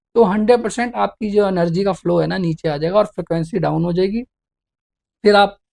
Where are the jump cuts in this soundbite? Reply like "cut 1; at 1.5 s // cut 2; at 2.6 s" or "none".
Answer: none